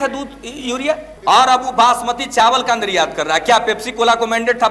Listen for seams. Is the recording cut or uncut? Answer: cut